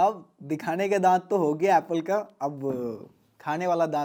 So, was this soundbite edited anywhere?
no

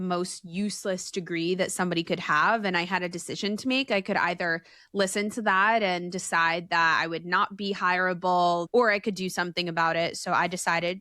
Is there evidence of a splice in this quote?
yes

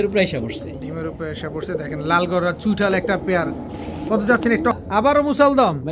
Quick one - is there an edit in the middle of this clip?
yes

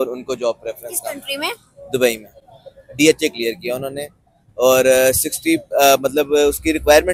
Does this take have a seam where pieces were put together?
no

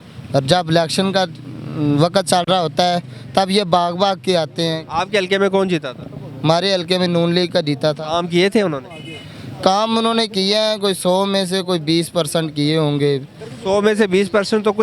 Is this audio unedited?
yes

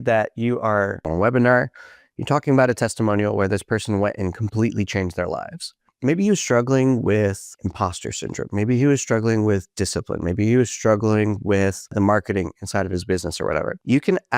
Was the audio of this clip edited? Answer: yes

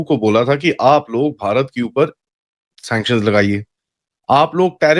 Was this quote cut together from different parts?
no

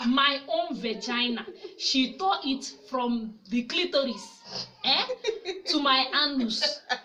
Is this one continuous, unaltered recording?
yes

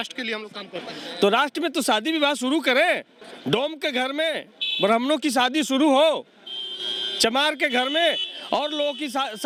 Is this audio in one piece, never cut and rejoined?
yes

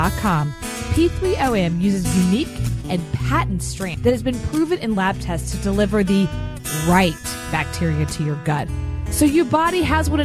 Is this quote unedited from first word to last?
no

